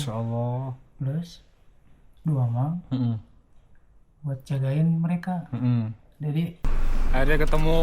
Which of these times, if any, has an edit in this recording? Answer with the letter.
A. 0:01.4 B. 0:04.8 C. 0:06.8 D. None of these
C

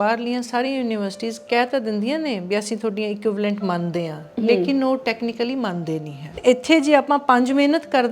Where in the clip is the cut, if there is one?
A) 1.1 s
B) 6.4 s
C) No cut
B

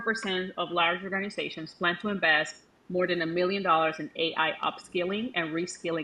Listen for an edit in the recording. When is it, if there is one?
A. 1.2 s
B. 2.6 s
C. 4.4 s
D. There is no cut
D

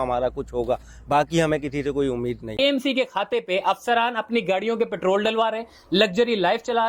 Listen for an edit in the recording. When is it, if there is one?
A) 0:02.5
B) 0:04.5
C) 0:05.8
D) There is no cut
A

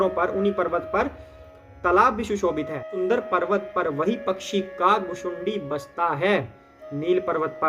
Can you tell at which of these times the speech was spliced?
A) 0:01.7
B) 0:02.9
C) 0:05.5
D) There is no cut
B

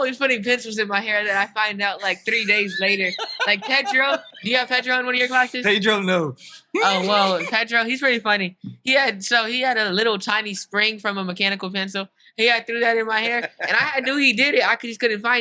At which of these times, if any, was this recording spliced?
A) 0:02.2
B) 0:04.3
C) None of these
B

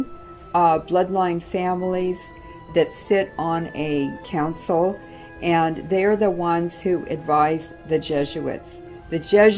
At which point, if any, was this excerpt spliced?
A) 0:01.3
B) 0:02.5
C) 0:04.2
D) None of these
C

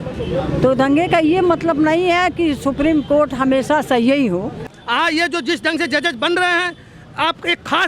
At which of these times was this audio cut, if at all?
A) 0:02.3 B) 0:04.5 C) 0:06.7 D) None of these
B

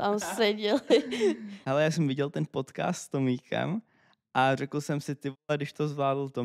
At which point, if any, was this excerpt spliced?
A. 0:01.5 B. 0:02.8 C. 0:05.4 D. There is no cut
A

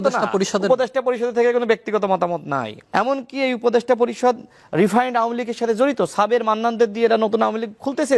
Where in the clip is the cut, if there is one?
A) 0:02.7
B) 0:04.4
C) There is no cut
A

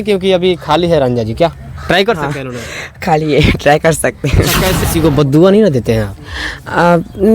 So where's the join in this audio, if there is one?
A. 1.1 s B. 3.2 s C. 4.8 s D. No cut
C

